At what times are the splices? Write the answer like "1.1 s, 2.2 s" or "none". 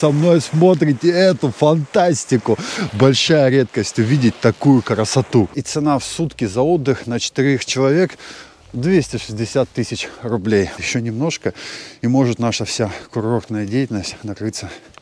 5.6 s, 10.8 s